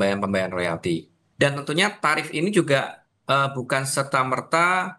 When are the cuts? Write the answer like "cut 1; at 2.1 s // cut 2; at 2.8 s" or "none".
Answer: cut 1; at 1.2 s